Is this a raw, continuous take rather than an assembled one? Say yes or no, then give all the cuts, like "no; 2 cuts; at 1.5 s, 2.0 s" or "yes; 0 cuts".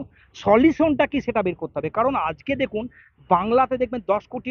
yes; 0 cuts